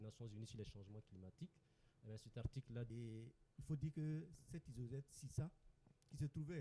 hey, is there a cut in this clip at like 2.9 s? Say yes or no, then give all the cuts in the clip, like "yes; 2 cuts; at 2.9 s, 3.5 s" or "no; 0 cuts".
yes; 1 cut; at 2.9 s